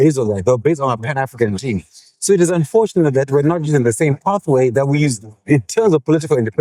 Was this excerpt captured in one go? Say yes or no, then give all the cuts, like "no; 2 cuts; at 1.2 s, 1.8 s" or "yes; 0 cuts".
yes; 0 cuts